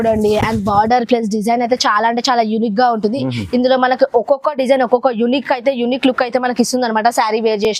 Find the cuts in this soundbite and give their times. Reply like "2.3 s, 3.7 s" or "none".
none